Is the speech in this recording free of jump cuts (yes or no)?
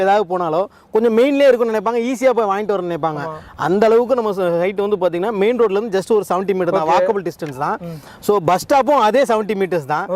yes